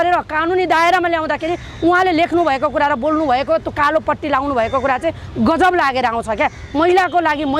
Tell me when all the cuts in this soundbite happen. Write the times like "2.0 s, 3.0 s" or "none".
none